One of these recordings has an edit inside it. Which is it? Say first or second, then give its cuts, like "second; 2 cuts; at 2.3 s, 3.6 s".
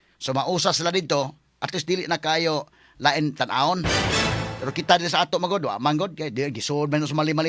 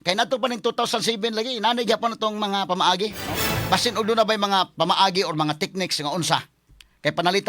second; 1 cut; at 3.3 s